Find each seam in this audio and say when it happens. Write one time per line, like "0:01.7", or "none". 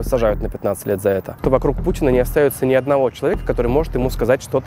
0:01.4

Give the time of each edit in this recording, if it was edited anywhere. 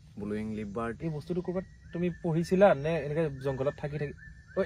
0:01.0

